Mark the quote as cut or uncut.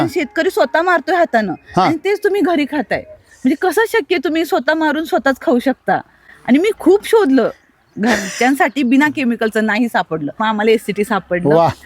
cut